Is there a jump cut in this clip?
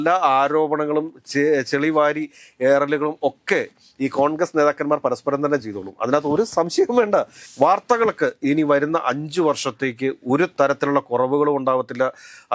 yes; 1 cut; at 7.4 s

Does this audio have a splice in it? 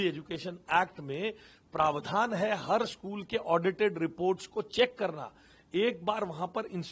no; 0 cuts

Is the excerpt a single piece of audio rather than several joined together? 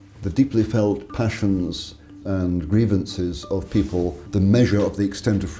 no; 2 cuts; at 2.2 s, 4.2 s

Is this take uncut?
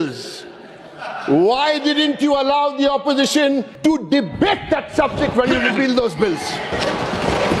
no; 1 cut; at 3.7 s

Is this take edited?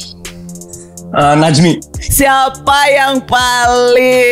yes; 1 cut; at 2.1 s

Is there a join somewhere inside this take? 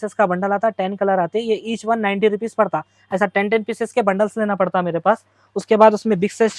no; 0 cuts

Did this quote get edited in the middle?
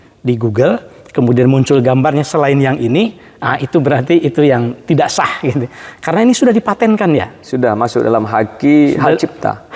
no; 0 cuts

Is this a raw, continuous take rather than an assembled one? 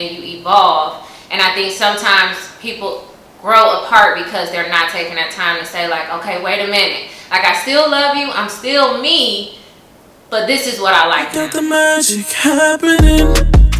no; 1 cut; at 11.5 s

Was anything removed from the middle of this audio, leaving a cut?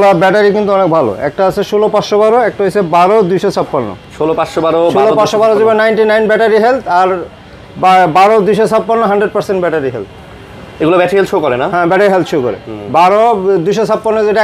no; 0 cuts

